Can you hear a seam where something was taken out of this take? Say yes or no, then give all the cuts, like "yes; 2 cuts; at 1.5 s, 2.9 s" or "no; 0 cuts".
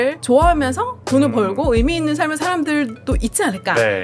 no; 0 cuts